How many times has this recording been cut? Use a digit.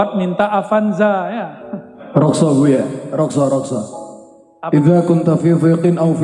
1